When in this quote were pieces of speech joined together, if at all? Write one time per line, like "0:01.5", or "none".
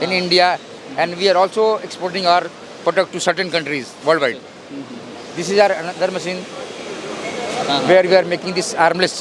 none